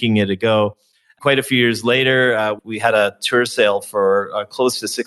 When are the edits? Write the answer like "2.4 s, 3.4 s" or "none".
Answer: 1.2 s, 2.6 s

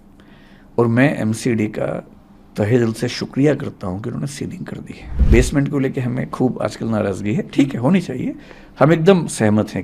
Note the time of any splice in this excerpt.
5.2 s

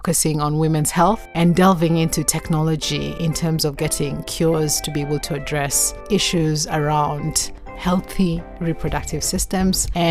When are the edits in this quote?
none

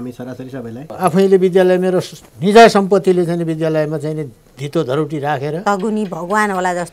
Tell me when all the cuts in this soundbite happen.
0.9 s, 5.6 s

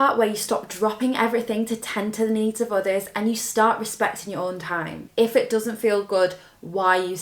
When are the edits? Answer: 5.0 s

